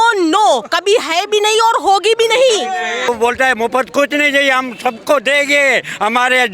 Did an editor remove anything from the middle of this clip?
yes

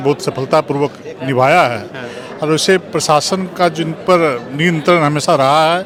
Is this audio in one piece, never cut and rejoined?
yes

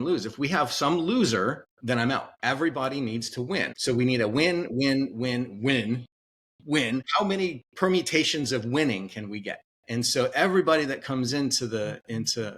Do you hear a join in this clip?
yes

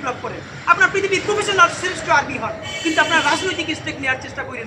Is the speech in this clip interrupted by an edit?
no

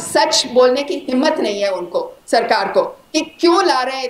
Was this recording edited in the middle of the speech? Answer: no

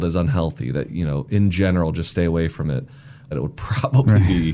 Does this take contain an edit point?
yes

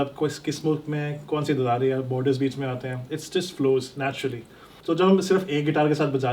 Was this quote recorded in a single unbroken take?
no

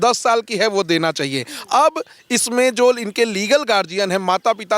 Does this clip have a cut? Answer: no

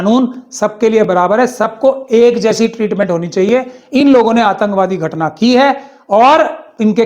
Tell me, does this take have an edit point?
no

